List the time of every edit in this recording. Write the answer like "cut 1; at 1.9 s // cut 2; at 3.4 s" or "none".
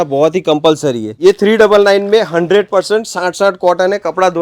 cut 1; at 1.1 s